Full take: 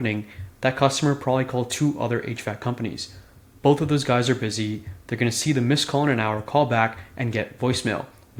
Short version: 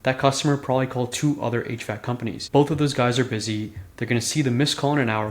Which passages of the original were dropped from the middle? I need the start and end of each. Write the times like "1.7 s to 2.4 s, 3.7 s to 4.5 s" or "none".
3.0 s to 3.5 s